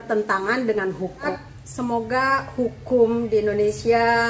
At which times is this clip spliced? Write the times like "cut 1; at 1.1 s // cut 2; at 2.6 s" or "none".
cut 1; at 1.3 s